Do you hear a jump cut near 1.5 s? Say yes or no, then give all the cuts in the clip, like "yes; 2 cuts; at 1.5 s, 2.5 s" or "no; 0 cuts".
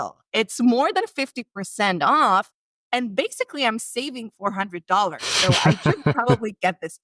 no; 0 cuts